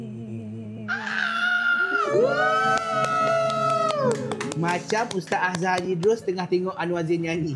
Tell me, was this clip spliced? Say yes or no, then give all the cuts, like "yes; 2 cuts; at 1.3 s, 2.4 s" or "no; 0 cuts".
no; 0 cuts